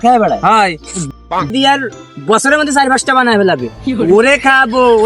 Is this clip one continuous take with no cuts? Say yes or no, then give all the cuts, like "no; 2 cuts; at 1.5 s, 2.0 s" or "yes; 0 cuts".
no; 1 cut; at 1.5 s